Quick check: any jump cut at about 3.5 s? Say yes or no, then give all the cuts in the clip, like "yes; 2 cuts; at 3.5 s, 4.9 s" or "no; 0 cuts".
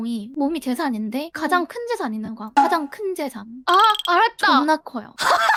no; 0 cuts